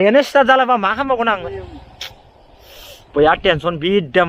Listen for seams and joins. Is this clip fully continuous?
no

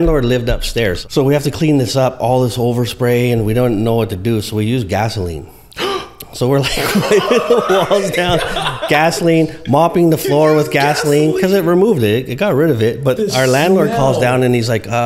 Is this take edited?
yes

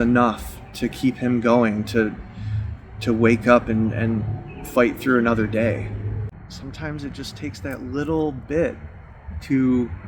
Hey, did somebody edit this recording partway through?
yes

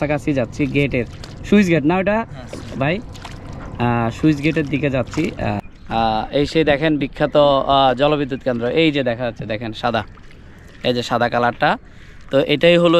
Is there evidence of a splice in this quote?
yes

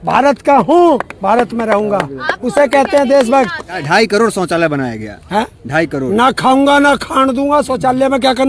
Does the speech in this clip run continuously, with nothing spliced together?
no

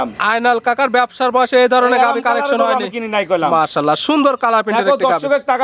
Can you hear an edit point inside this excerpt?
no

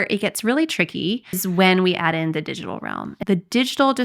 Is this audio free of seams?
no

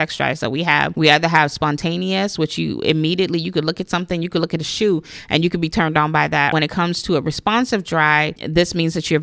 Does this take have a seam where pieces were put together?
yes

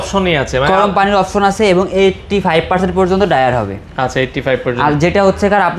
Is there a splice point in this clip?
no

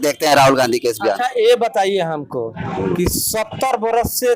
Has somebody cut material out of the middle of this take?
no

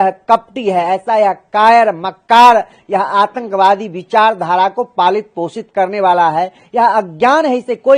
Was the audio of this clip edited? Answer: no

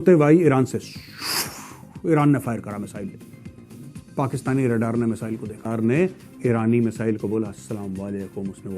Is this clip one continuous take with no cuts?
no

